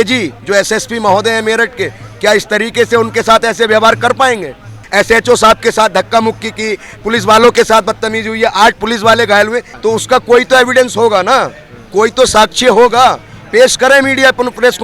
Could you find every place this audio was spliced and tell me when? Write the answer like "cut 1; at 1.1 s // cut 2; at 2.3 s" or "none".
cut 1; at 4.8 s // cut 2; at 9.7 s